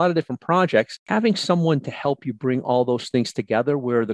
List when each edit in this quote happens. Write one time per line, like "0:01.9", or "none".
0:01.0